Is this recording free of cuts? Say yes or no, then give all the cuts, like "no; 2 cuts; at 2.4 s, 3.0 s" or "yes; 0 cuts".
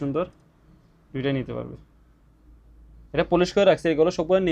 yes; 0 cuts